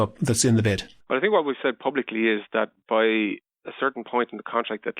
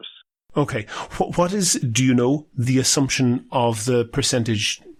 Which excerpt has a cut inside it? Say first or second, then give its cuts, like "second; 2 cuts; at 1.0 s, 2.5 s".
first; 1 cut; at 0.9 s